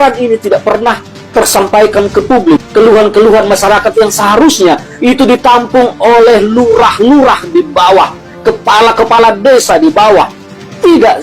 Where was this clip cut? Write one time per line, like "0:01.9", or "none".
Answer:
none